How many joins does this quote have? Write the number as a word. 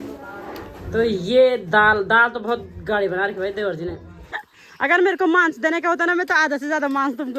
one